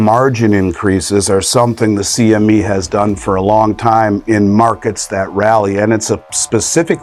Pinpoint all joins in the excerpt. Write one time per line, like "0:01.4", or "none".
none